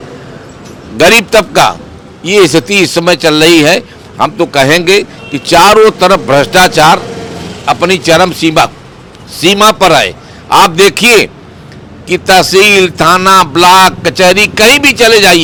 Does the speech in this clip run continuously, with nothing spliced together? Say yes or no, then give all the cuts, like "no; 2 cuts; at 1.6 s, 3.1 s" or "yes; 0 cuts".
yes; 0 cuts